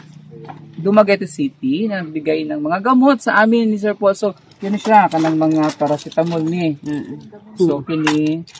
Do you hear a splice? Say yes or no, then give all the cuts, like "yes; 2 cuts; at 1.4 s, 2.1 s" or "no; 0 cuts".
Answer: yes; 1 cut; at 4.5 s